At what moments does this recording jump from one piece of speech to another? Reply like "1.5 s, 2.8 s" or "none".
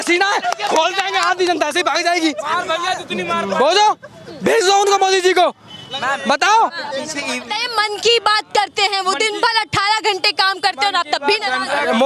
none